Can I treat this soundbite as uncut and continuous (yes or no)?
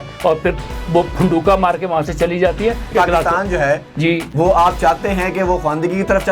no